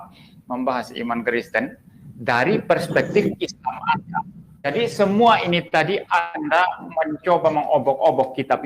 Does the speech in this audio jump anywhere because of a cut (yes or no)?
yes